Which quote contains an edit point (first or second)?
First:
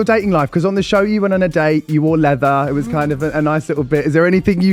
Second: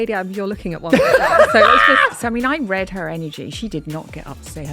second